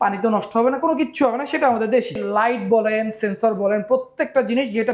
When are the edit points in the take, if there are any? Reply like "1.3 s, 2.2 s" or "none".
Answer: 2.2 s